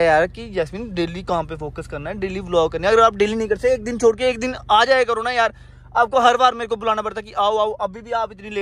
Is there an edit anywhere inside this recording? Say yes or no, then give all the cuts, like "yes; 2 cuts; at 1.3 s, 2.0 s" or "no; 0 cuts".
no; 0 cuts